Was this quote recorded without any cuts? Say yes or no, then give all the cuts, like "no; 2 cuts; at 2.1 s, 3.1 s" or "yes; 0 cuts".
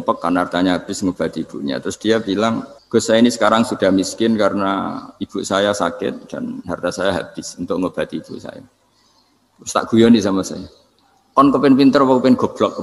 no; 1 cut; at 2.7 s